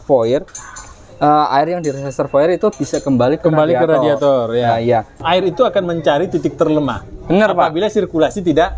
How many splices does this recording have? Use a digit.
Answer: 1